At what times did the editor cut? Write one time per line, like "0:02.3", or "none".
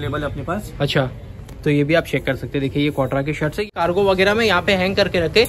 0:03.7